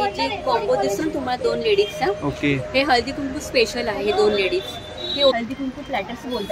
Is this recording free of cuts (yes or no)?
no